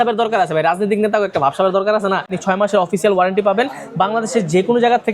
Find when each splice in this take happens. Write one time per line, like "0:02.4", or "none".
0:02.3